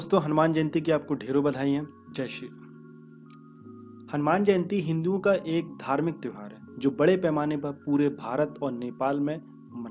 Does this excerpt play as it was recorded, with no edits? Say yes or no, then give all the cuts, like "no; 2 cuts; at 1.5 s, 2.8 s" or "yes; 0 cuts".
no; 2 cuts; at 2.4 s, 4.1 s